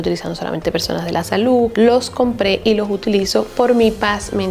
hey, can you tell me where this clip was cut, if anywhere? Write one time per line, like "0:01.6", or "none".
0:01.7